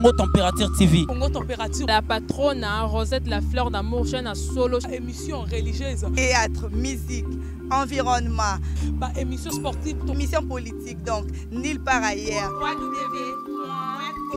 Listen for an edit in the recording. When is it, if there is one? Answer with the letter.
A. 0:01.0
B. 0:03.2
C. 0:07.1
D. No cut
D